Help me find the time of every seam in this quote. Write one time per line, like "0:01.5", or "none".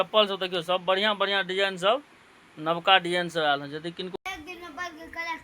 0:04.1